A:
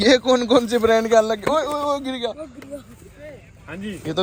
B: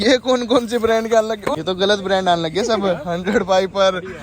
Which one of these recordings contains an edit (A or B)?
B